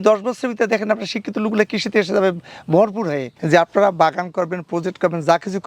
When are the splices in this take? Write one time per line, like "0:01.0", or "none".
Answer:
0:03.3